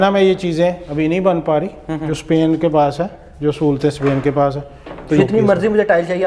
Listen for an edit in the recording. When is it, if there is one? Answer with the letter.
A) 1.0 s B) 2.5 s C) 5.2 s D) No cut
C